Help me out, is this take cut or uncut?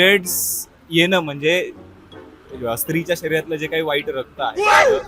uncut